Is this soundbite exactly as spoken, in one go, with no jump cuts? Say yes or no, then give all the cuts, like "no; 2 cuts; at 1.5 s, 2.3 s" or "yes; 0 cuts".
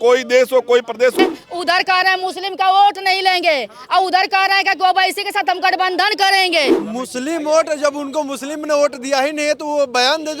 no; 2 cuts; at 1.1 s, 6.7 s